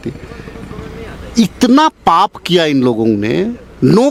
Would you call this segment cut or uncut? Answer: uncut